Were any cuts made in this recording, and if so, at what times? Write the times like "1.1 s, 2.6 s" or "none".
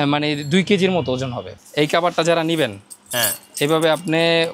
1.5 s

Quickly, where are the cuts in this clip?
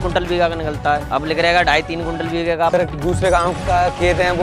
1.1 s, 2.7 s

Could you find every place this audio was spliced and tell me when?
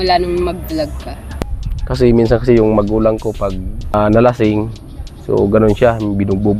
1.1 s, 3.9 s

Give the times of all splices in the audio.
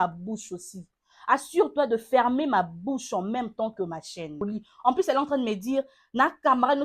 4.4 s

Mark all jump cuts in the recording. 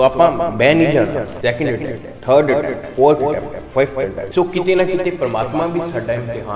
1.2 s, 4.2 s

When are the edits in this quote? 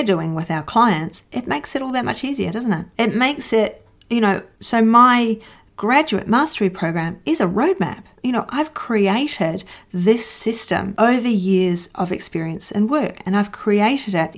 none

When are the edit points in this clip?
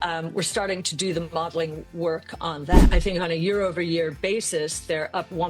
2.8 s

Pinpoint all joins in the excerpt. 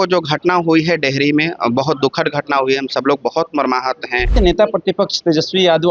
4.3 s

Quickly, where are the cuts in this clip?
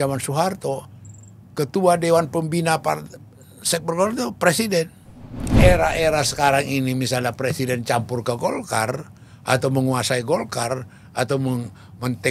5.5 s

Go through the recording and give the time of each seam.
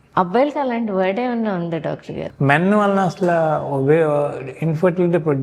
2.2 s

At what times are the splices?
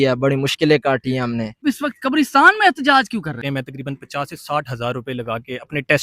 1.6 s, 3.6 s

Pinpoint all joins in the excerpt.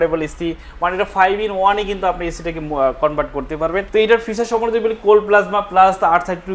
3.9 s

